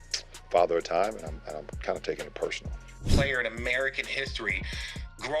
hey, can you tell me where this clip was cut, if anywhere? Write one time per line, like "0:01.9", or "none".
0:03.1